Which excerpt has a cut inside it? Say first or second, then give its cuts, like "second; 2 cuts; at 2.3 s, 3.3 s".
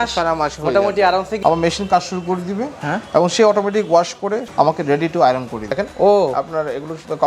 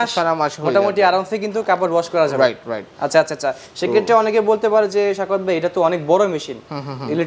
first; 3 cuts; at 1.3 s, 4.5 s, 5.6 s